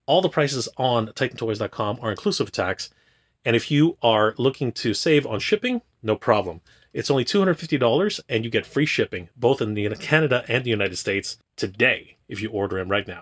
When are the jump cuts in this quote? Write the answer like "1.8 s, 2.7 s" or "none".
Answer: 11.4 s

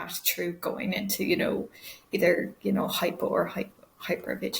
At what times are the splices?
none

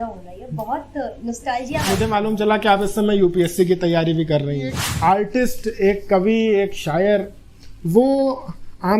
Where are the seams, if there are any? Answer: 1.8 s, 4.8 s

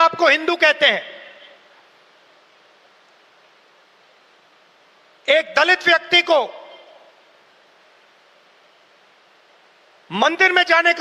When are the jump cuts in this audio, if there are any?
none

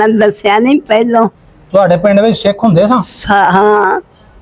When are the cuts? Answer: 1.5 s

